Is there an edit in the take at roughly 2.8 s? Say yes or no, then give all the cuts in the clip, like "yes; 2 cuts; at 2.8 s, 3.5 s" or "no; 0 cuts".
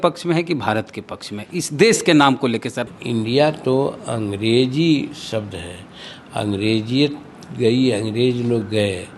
yes; 1 cut; at 2.8 s